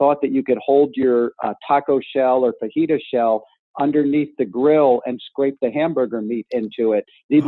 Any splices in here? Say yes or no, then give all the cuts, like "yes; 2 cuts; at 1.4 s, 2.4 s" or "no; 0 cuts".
no; 0 cuts